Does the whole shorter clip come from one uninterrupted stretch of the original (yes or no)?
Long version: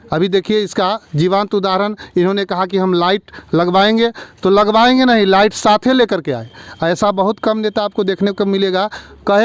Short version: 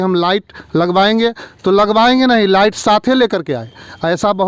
yes